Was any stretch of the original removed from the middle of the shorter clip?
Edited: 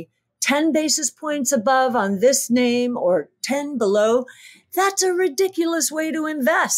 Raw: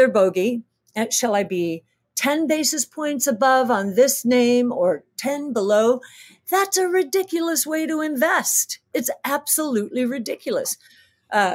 no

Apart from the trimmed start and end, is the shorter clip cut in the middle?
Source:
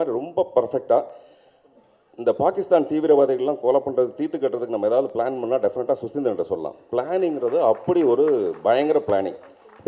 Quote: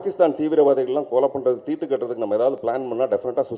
no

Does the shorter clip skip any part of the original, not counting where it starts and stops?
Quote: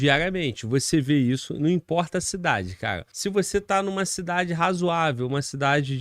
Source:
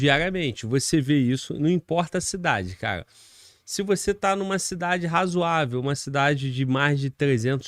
yes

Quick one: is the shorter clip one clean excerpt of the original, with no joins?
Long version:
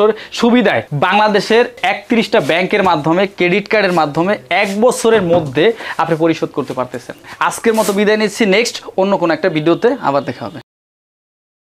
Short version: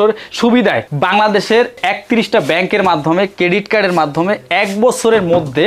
yes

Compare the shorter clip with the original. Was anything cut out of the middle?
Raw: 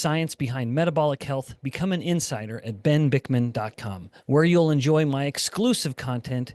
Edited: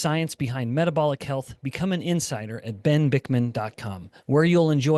no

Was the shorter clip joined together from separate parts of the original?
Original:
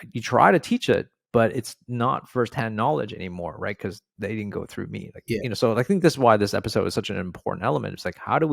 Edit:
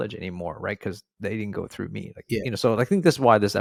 no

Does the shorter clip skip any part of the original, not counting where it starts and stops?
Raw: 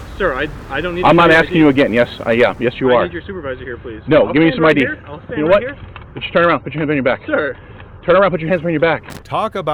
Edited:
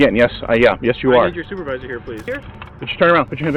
yes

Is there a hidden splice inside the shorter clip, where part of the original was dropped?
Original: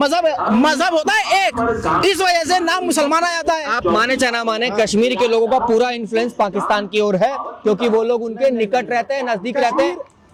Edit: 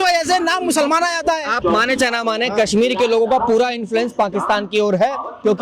no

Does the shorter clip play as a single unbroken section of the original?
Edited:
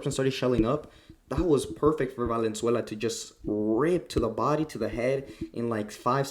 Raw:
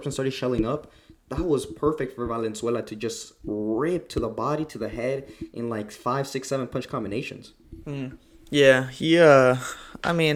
yes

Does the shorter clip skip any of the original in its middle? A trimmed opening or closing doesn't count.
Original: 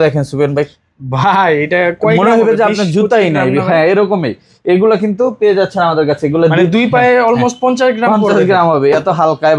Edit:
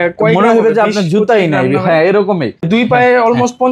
yes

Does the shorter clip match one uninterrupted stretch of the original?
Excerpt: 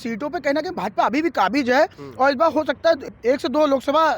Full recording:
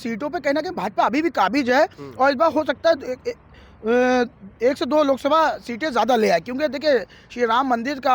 no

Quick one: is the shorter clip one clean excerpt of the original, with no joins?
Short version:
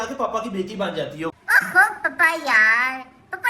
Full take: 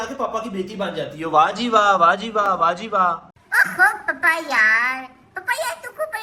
no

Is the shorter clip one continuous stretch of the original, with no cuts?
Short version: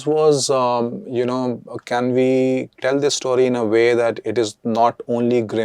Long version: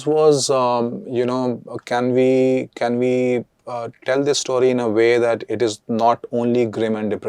no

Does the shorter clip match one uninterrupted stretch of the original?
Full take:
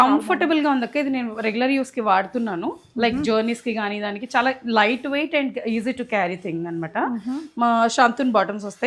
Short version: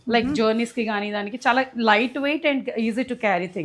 yes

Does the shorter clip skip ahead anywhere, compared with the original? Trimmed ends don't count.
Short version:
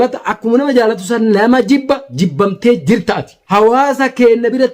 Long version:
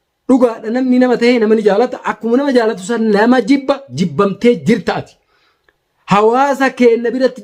yes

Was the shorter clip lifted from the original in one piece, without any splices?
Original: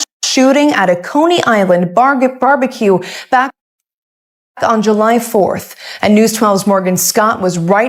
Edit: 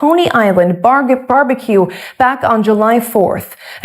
no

